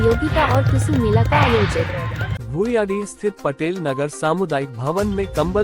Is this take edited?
yes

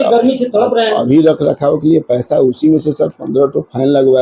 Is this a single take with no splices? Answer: yes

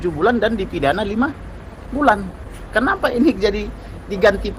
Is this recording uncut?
yes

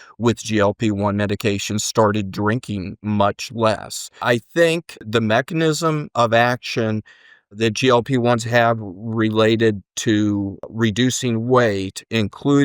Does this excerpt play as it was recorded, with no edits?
no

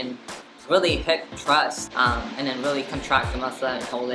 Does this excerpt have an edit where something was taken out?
yes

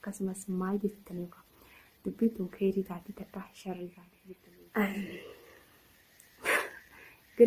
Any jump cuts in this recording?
yes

